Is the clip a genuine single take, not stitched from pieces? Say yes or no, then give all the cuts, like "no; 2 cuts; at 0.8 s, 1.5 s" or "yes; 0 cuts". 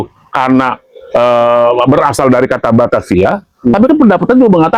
yes; 0 cuts